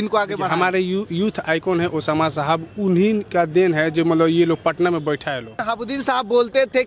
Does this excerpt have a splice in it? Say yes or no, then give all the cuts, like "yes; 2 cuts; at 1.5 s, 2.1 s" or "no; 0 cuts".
yes; 1 cut; at 5.6 s